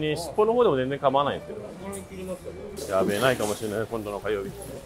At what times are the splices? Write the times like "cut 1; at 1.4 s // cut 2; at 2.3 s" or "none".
cut 1; at 2.7 s